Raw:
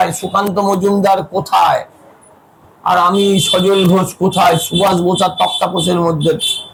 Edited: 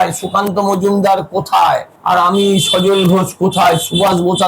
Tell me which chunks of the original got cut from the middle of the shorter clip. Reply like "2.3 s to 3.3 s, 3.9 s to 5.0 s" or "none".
1.9 s to 2.7 s